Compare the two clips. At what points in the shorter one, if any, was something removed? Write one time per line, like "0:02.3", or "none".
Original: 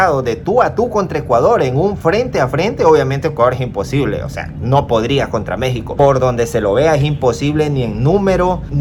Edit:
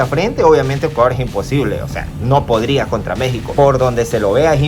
none